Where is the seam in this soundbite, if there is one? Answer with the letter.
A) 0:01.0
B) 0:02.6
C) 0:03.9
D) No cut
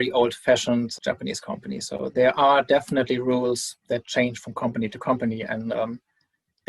A